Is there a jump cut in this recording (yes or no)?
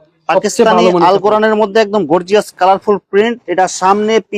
no